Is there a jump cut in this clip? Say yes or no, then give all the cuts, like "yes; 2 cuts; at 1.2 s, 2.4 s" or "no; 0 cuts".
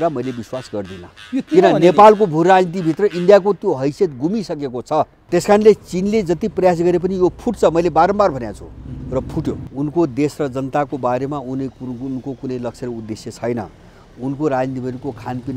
yes; 2 cuts; at 5.2 s, 9.7 s